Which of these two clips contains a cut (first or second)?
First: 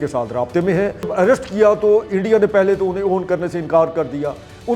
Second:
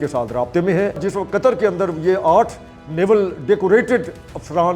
second